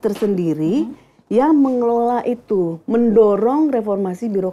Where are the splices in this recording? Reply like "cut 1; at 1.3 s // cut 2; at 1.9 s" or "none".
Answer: none